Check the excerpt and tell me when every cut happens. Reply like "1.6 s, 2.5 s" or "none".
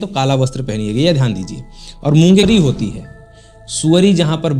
2.4 s